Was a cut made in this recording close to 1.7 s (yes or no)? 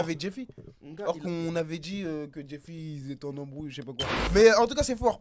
no